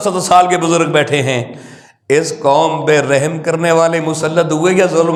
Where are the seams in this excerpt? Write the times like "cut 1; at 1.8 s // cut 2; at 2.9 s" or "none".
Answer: none